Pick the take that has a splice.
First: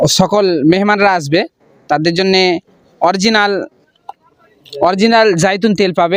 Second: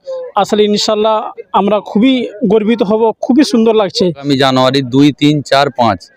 second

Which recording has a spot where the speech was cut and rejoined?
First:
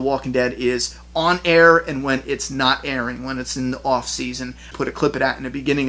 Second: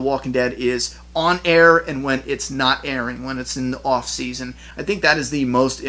first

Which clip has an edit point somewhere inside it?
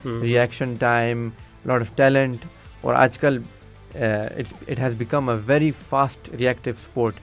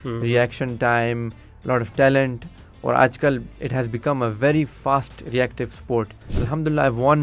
second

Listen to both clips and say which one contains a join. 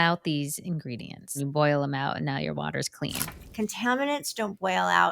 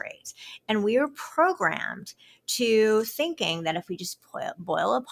first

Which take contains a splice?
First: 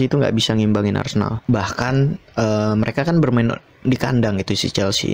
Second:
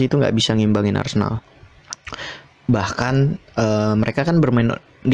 first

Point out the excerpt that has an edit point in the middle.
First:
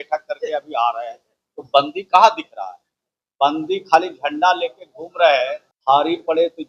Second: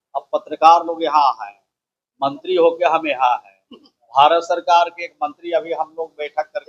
first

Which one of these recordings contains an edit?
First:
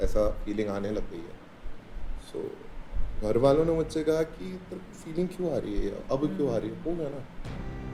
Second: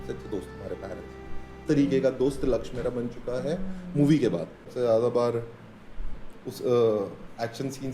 second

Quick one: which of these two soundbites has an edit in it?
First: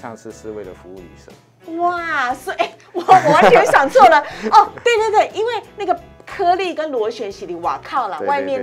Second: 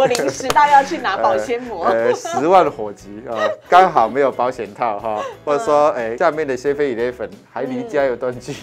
second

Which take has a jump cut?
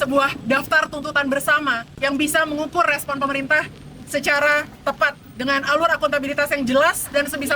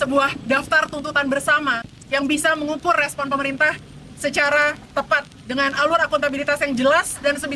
first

